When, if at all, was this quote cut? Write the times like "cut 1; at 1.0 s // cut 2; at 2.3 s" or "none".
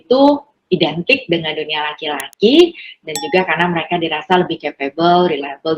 none